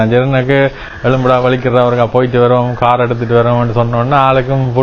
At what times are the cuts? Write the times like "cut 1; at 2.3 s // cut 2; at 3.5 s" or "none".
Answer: none

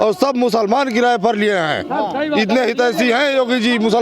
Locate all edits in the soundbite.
none

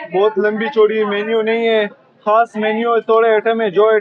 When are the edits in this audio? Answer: none

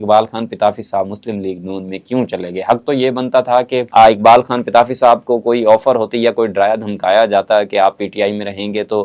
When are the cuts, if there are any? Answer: none

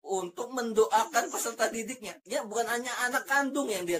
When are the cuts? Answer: cut 1; at 2.2 s

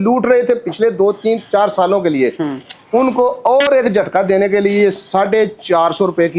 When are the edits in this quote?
none

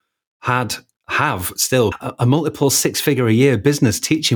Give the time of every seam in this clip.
cut 1; at 1.9 s

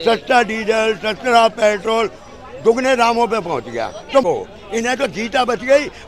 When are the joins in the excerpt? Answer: cut 1; at 4.2 s

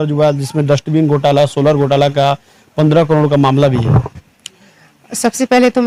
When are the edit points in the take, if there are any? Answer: none

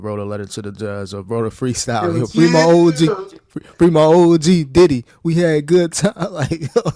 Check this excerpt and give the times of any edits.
none

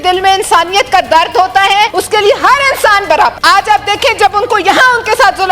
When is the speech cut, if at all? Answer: cut 1; at 2.0 s // cut 2; at 3.4 s

